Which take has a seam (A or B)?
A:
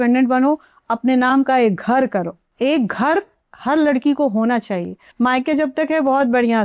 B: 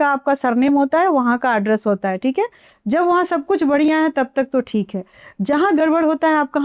A